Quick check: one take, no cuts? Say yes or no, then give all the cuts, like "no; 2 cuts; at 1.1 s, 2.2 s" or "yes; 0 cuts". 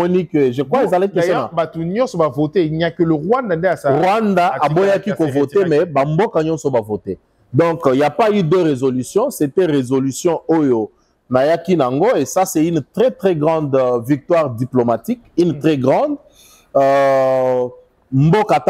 yes; 0 cuts